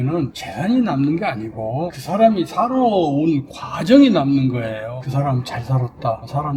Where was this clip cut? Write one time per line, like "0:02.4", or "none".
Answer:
0:05.0